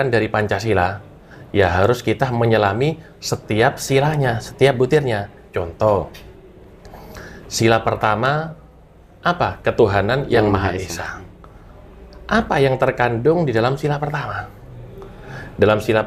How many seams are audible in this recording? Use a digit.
0